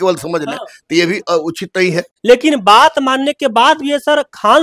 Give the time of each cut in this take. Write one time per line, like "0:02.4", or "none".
0:02.1